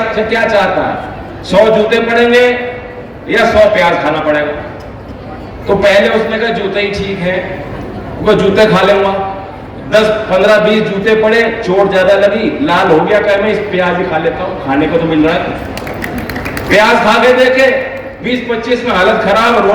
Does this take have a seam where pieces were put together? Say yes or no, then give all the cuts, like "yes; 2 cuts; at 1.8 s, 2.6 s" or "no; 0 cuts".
no; 0 cuts